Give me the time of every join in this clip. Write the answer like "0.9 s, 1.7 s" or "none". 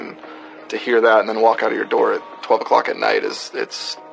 none